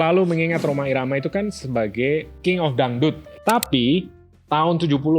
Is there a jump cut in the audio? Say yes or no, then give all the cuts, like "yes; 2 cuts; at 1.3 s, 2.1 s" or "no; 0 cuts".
yes; 2 cuts; at 2.3 s, 3.3 s